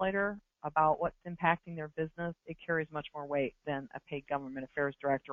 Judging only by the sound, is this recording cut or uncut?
uncut